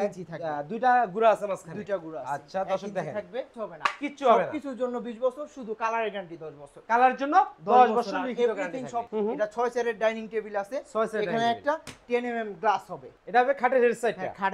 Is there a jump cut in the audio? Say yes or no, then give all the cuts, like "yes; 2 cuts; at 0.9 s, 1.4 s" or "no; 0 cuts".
yes; 3 cuts; at 3.5 s, 9.1 s, 13.1 s